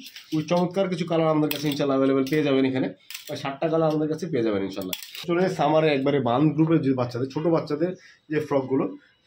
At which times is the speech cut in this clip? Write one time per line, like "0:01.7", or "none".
0:05.2